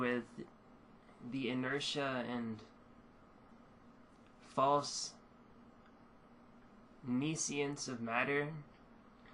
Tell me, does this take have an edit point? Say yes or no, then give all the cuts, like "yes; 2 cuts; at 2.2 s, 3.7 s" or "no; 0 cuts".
yes; 1 cut; at 4.8 s